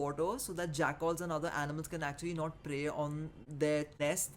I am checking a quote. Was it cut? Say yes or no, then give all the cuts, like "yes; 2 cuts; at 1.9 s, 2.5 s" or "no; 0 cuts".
no; 0 cuts